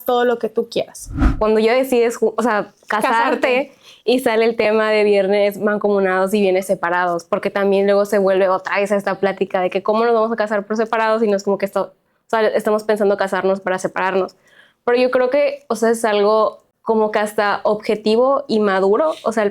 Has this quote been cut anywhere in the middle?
yes; 2 cuts; at 1.5 s, 16.7 s

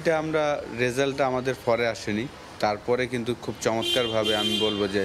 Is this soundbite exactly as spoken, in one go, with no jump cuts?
no; 1 cut; at 2.4 s

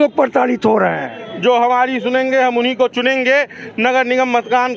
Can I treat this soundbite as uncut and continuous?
no; 1 cut; at 1.2 s

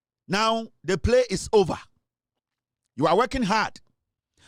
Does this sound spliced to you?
no; 0 cuts

